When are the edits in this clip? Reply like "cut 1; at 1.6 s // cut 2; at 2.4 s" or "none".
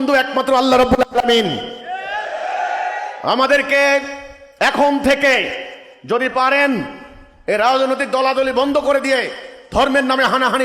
none